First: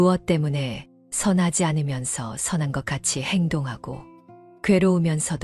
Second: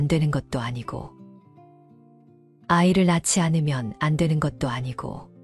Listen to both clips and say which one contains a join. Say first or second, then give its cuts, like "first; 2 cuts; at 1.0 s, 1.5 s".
second; 2 cuts; at 1.2 s, 2.7 s